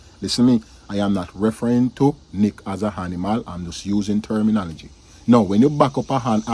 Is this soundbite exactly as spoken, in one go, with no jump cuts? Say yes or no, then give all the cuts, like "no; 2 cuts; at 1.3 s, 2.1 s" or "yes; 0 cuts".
yes; 0 cuts